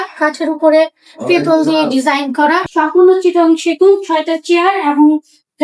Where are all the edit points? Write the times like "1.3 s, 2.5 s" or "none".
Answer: 2.7 s